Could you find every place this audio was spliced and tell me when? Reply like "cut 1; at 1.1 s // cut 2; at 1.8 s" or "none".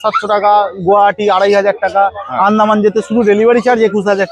none